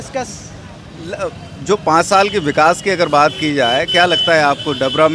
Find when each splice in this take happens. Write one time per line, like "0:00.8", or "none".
none